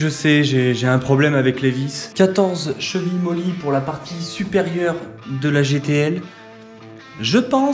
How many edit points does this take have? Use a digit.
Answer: 0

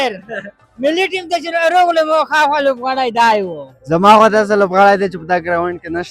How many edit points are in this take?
1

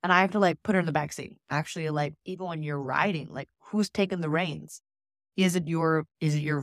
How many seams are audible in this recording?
1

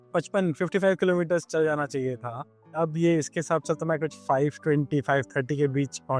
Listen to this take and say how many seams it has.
1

